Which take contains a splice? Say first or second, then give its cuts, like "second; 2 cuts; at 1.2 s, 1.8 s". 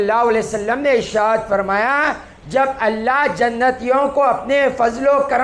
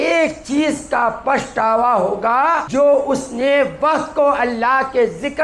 second; 1 cut; at 2.7 s